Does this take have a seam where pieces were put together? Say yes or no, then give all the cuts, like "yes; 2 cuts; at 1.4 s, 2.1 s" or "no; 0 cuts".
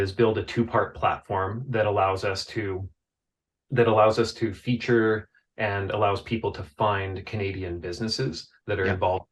no; 0 cuts